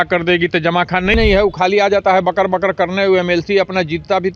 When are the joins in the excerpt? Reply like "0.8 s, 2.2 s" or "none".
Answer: 1.2 s